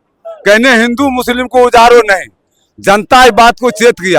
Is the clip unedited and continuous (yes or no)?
yes